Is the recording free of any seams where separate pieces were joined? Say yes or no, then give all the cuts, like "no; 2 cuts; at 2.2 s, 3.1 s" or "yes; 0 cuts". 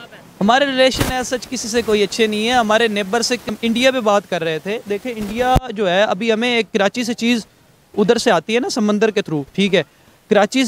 no; 1 cut; at 3.4 s